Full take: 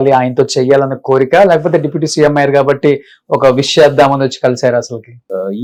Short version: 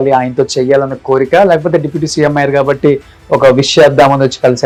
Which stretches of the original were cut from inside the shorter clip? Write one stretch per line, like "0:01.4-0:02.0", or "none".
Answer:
none